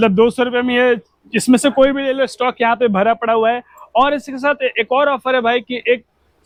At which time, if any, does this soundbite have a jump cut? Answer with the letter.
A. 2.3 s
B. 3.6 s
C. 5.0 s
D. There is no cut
D